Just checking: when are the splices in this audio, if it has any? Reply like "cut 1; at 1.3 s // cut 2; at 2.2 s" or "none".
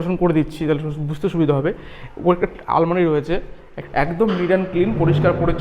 cut 1; at 3.8 s